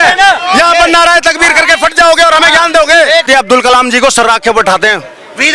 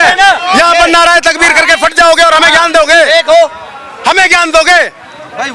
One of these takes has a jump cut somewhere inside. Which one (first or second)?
first